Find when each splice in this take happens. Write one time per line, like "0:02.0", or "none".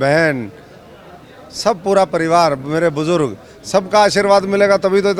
none